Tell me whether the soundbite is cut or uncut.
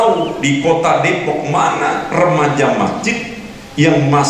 uncut